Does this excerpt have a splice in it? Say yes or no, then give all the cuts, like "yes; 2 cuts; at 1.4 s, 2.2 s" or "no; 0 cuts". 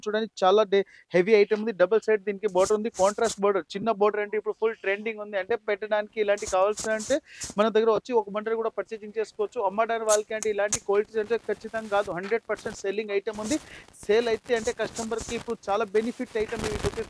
no; 0 cuts